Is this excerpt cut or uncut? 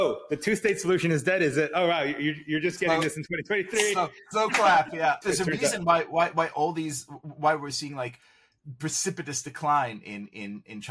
cut